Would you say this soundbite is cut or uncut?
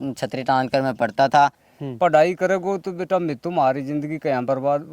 cut